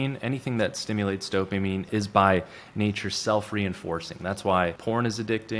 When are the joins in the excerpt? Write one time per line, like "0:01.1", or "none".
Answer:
0:01.9
0:04.8